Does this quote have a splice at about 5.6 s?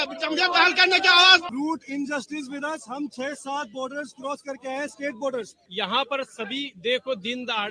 yes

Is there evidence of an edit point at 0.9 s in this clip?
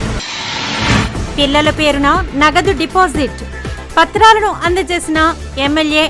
yes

